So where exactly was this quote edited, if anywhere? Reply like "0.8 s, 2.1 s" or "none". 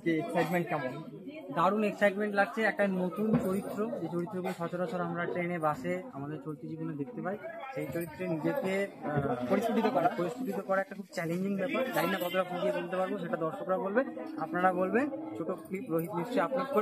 none